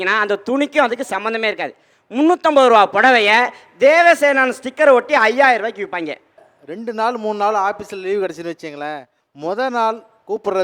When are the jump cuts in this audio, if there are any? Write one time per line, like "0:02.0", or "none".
0:06.3